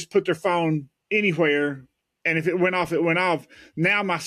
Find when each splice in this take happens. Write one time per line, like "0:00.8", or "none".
0:00.9